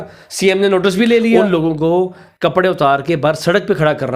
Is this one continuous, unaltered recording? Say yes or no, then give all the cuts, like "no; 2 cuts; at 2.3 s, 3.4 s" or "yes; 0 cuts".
no; 1 cut; at 1.4 s